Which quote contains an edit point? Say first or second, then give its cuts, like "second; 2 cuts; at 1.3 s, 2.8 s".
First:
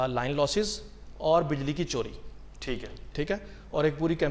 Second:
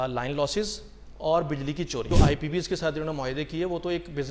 second; 1 cut; at 2.1 s